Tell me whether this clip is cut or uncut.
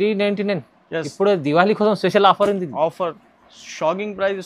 cut